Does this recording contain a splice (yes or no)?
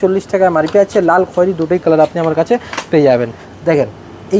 yes